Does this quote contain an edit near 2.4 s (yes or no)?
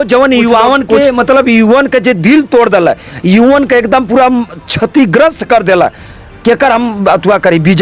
no